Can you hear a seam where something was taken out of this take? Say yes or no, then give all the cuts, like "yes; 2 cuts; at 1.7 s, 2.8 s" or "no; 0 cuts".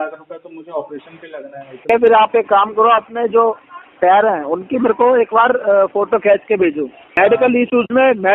yes; 2 cuts; at 1.9 s, 7.0 s